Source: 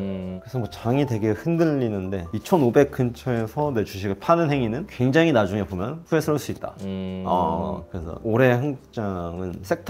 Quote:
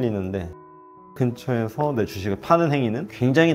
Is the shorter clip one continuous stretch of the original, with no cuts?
yes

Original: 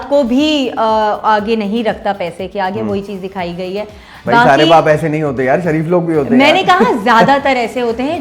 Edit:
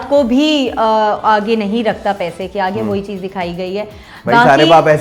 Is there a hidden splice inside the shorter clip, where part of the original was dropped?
no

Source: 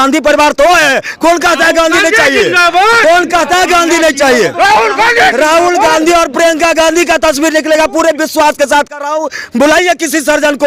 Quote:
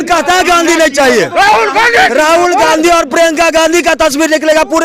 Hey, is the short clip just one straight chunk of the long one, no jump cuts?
yes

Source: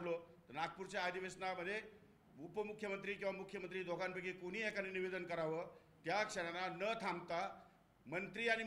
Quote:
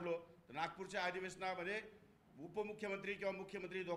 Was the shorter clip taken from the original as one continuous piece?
yes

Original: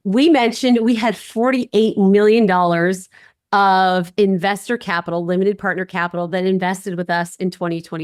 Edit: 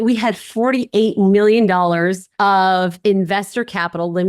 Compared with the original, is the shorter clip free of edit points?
no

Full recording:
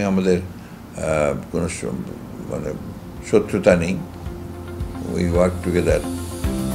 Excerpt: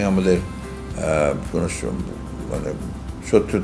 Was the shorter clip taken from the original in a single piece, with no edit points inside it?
yes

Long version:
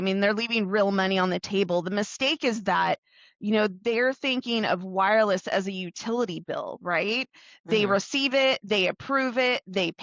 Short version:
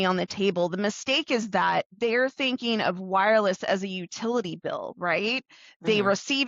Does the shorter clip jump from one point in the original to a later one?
yes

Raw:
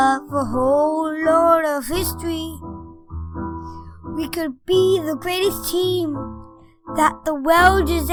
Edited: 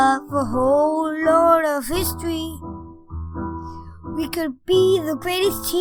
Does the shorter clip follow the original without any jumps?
yes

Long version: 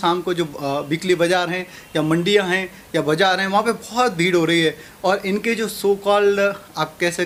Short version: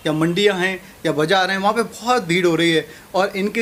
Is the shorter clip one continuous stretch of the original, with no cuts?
yes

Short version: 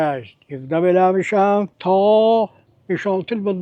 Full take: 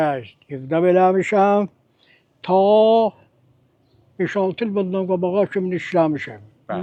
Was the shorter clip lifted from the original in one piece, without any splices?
no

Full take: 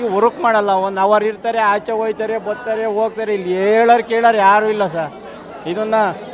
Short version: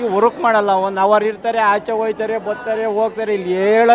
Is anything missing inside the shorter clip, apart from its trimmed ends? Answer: no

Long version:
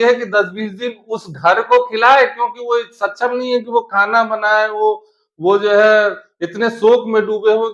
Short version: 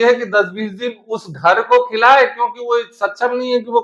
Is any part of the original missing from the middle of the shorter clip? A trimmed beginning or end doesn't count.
no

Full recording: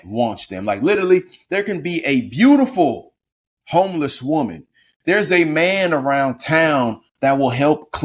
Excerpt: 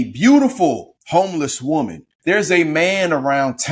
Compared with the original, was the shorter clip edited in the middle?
yes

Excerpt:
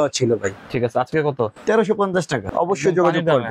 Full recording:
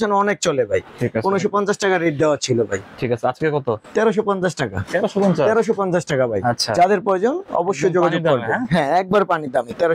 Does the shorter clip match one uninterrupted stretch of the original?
no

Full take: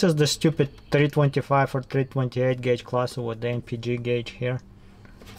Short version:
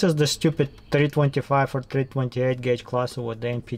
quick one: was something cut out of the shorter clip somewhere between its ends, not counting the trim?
no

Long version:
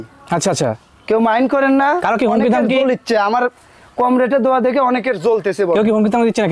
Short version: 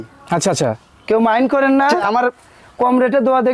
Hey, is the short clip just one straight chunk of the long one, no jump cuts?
no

